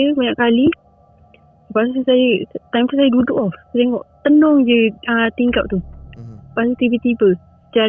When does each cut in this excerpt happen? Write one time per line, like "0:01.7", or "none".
none